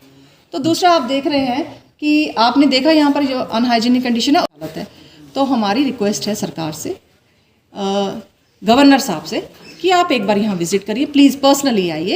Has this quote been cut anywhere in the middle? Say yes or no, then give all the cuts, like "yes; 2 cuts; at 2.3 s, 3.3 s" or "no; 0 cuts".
yes; 1 cut; at 4.4 s